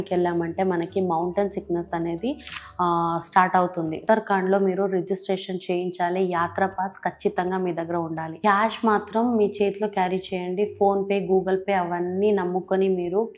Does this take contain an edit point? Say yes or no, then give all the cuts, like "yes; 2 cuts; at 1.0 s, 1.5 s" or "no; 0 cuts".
yes; 2 cuts; at 4.0 s, 8.3 s